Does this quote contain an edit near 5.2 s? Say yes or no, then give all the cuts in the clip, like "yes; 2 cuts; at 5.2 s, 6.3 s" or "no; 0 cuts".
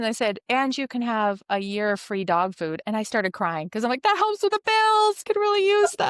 yes; 1 cut; at 5.2 s